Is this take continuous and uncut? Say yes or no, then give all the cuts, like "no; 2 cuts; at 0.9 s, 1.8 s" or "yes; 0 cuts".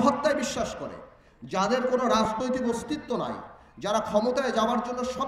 yes; 0 cuts